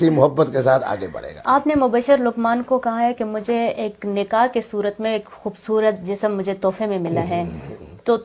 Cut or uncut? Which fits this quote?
cut